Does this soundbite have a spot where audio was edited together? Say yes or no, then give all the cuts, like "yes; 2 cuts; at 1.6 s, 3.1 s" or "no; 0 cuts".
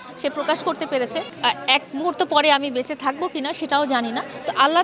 yes; 1 cut; at 1.3 s